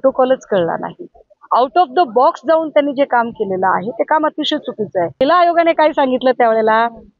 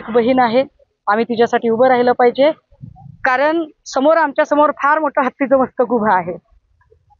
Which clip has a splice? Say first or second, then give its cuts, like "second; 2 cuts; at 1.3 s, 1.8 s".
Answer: first; 1 cut; at 5.2 s